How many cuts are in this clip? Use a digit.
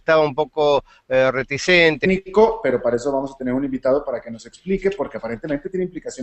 0